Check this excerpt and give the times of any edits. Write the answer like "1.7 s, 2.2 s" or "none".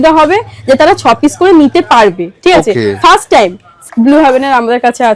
3.7 s